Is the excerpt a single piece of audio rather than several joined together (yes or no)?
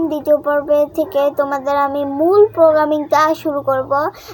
yes